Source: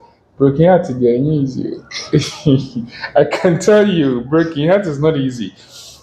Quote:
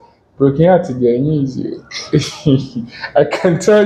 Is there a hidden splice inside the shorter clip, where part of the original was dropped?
no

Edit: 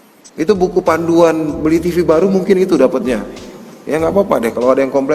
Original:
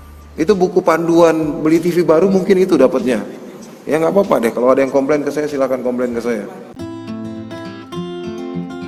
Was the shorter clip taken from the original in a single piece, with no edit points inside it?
yes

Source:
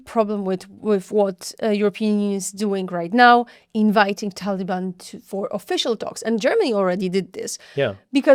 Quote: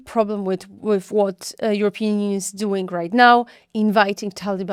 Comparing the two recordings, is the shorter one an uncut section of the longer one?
yes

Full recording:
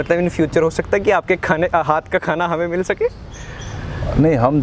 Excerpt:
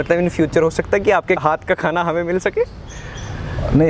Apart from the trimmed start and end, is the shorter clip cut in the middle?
yes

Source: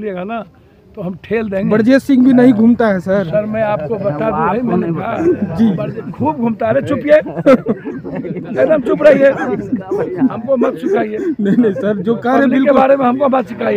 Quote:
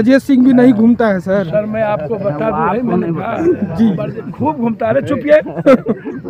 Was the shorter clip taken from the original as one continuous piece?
yes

